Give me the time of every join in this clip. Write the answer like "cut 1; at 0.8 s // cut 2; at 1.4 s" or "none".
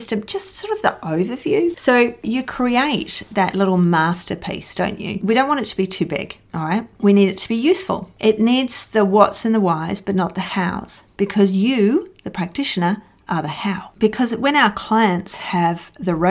cut 1; at 2.2 s // cut 2; at 5.2 s // cut 3; at 13.9 s

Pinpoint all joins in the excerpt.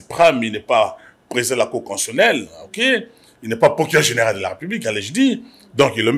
none

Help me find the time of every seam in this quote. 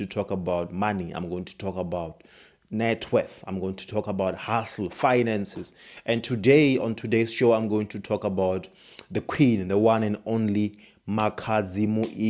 none

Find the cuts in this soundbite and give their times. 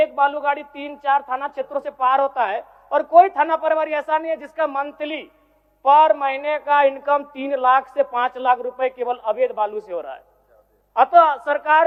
none

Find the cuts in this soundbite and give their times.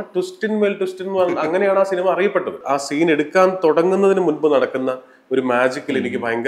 cut 1; at 2.6 s

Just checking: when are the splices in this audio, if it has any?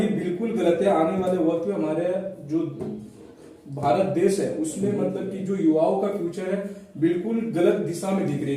none

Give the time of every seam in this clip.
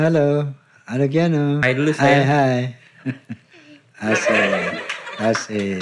cut 1; at 1.6 s

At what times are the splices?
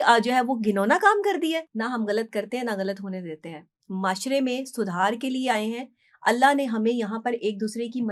cut 1; at 1.7 s

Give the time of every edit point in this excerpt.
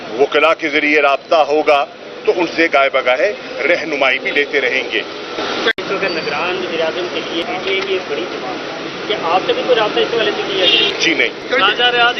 cut 1; at 5.8 s // cut 2; at 7.4 s // cut 3; at 11.0 s

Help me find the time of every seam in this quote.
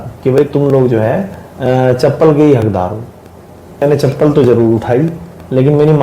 cut 1; at 3.8 s

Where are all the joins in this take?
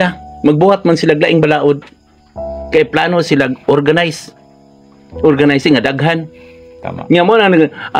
none

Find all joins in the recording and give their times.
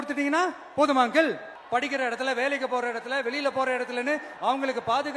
cut 1; at 1.5 s

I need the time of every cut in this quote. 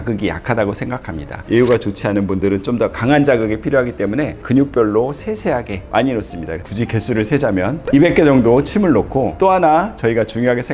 cut 1; at 1.4 s // cut 2; at 4.4 s // cut 3; at 6.6 s

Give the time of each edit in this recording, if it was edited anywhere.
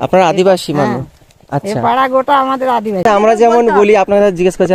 cut 1; at 3.0 s

